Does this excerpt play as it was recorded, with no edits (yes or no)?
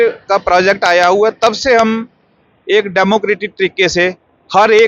yes